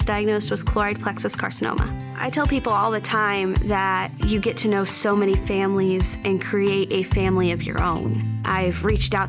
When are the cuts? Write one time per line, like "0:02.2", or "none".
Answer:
none